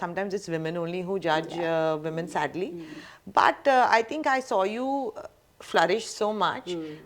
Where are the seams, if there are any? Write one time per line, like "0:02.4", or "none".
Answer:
none